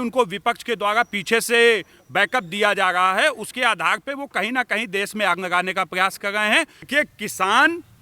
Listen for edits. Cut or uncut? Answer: cut